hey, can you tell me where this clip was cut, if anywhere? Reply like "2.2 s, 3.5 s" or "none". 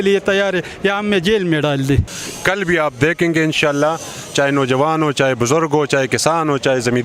2.1 s